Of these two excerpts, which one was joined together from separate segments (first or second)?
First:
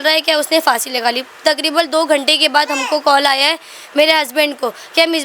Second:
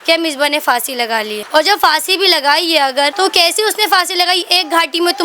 second